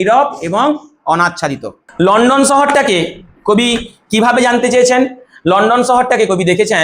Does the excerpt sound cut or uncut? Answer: cut